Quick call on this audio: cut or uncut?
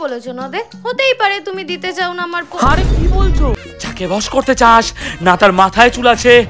cut